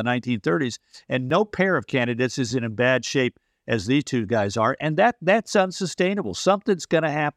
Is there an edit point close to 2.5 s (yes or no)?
yes